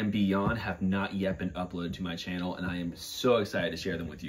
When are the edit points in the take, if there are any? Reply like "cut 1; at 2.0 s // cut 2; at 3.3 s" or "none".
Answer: none